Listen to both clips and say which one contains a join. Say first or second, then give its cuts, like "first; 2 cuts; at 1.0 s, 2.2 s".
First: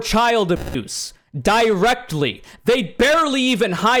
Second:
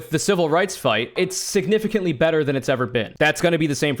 second; 2 cuts; at 1.2 s, 3.1 s